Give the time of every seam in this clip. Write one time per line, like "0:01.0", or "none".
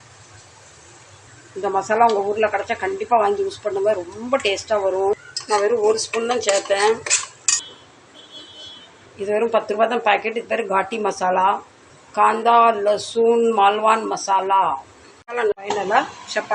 0:15.6